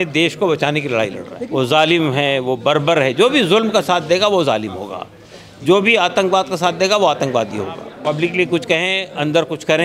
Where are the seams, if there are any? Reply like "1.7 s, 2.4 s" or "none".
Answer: 1.3 s, 7.9 s